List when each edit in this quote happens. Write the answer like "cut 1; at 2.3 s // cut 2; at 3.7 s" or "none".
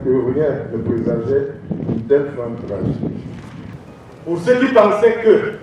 cut 1; at 3.8 s